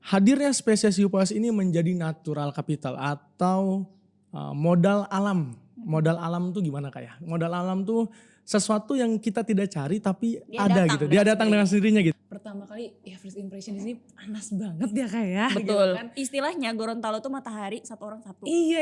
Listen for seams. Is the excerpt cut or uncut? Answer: cut